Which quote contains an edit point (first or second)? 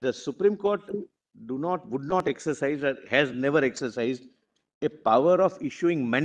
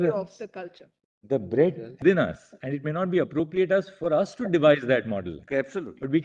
second